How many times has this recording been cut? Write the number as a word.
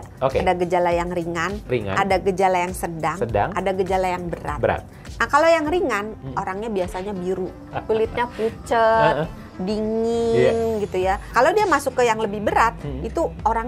two